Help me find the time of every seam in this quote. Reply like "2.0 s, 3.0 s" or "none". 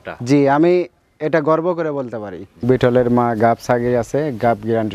2.6 s